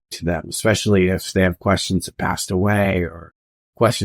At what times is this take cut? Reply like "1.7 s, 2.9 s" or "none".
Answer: 2.1 s